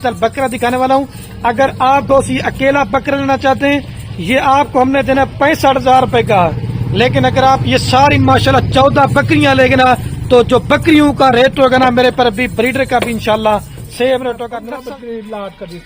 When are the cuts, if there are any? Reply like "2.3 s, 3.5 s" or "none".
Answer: 14.6 s